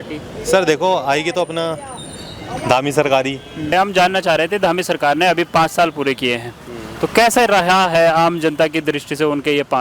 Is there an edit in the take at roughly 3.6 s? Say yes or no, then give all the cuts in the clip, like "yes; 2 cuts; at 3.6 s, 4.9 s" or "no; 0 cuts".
yes; 1 cut; at 3.6 s